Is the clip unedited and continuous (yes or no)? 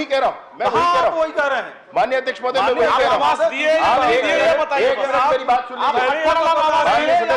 yes